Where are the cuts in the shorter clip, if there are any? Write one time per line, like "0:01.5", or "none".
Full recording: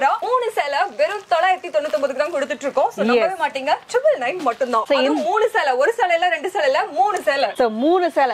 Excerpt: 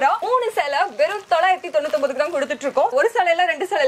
0:02.9